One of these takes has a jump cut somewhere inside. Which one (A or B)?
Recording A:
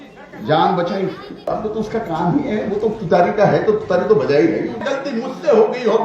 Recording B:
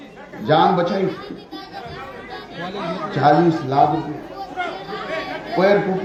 A